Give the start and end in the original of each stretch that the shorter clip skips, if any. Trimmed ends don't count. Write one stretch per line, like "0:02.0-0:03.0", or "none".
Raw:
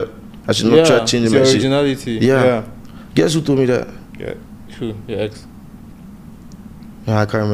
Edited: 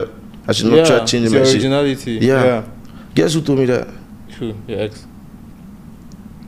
0:04.1-0:04.5